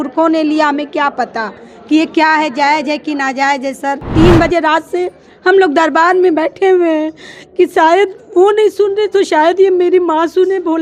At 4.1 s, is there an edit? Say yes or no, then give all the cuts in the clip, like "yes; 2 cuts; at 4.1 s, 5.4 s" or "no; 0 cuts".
yes; 1 cut; at 4.1 s